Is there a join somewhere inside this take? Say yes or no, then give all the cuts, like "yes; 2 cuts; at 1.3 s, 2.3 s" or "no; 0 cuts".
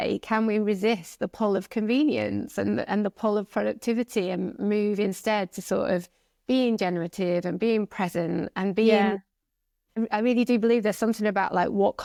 no; 0 cuts